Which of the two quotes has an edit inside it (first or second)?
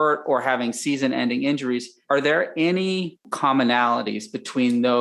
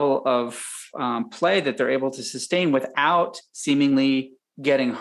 first